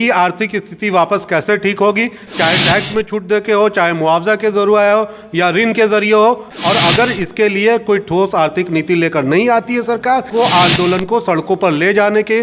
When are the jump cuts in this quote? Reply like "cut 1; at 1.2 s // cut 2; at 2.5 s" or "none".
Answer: cut 1; at 6.5 s // cut 2; at 10.3 s